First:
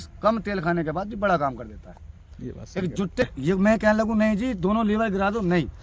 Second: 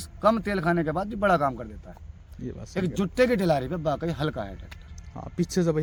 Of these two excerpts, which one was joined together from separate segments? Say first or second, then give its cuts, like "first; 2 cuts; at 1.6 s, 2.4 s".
first; 1 cut; at 3.2 s